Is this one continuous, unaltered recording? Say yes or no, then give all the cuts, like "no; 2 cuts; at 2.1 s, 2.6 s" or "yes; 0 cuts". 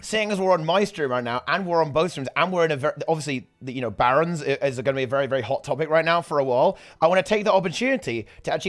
yes; 0 cuts